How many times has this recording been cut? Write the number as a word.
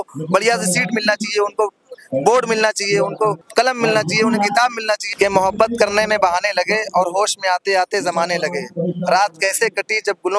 two